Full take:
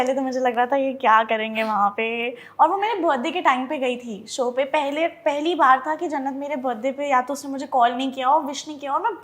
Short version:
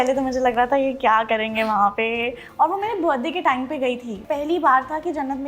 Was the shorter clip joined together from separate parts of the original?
yes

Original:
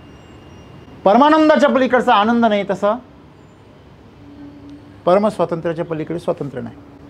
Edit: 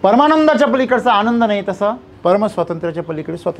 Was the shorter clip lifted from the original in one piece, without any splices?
no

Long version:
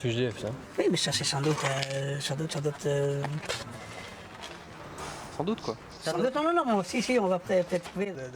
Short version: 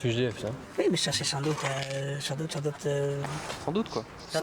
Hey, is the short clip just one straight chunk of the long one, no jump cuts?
no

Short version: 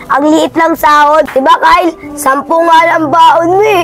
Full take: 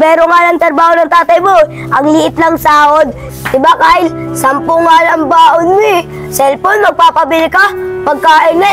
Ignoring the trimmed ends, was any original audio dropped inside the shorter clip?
yes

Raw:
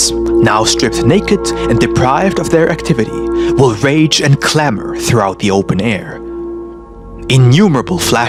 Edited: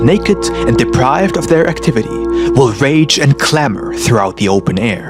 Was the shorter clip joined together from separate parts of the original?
no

